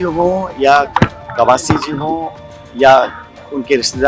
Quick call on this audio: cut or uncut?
uncut